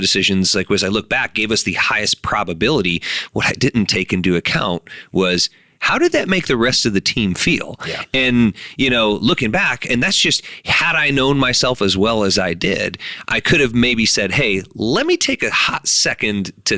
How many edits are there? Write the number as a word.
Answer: zero